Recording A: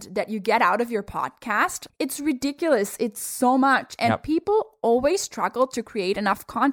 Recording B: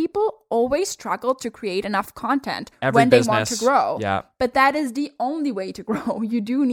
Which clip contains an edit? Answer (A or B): A